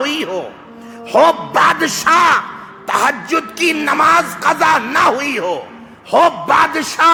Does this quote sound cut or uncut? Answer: uncut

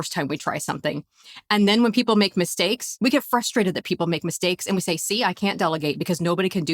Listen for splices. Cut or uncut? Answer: cut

